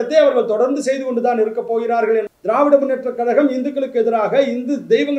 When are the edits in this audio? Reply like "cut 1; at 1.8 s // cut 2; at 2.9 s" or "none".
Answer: cut 1; at 2.3 s